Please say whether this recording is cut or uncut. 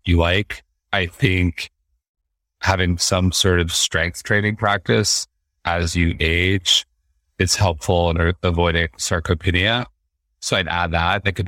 uncut